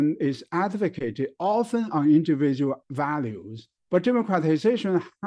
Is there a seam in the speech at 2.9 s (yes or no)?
yes